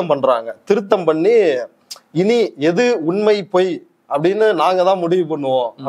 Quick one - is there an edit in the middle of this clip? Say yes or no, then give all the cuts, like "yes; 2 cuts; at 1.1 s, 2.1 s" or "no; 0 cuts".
no; 0 cuts